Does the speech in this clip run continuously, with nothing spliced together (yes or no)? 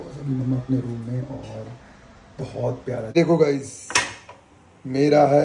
no